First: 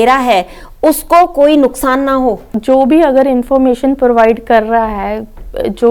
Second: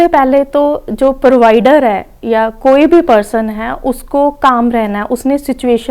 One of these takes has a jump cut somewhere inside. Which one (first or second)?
first